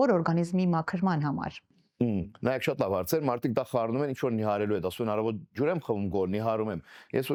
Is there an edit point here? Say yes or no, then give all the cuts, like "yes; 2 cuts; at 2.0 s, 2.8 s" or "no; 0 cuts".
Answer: no; 0 cuts